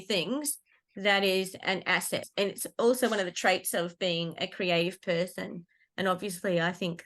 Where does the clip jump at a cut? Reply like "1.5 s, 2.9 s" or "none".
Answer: 2.2 s

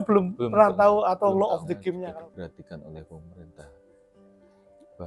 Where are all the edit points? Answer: 2.0 s

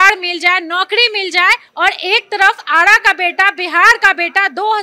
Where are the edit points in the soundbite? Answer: 1.7 s

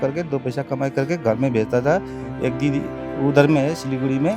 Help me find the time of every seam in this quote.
none

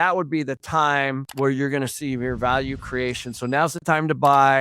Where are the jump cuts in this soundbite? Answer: 1.3 s

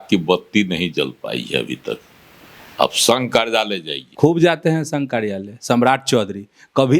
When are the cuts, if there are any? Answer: 4.0 s

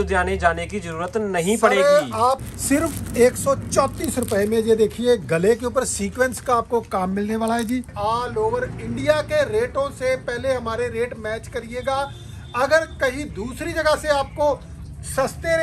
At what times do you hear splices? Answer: 2.4 s, 7.9 s

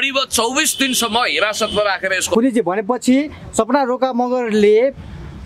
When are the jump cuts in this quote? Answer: 2.3 s

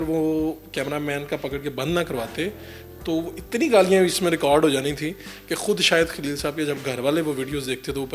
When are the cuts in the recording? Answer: none

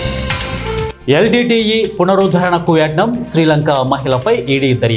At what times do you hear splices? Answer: 0.9 s

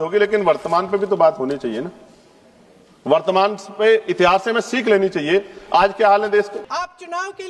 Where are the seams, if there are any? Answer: 6.6 s

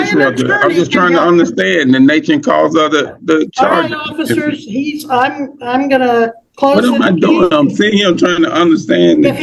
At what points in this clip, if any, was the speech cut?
none

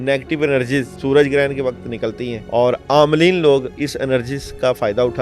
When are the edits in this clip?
0.9 s, 2.3 s

